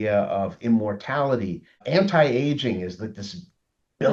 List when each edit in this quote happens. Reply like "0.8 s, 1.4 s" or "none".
1.8 s